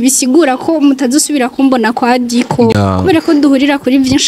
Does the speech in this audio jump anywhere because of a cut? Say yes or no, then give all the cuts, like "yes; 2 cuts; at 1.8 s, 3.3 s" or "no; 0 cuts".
yes; 1 cut; at 2.7 s